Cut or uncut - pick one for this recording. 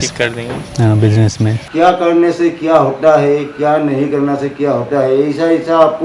cut